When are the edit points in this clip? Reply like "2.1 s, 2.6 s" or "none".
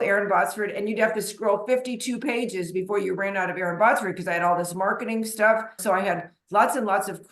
5.7 s